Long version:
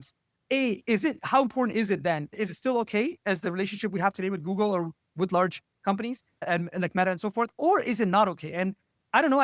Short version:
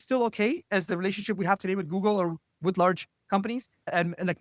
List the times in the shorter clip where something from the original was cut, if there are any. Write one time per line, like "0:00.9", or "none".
none